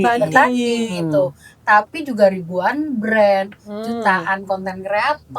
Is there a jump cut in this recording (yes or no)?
no